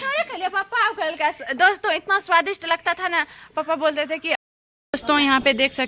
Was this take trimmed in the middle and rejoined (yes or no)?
yes